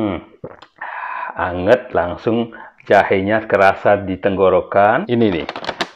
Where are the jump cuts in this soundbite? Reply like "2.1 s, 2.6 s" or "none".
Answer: 4.9 s